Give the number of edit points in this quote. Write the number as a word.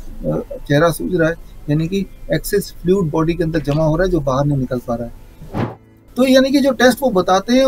one